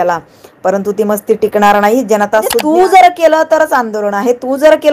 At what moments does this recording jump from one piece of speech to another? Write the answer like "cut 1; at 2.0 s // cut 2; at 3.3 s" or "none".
cut 1; at 2.6 s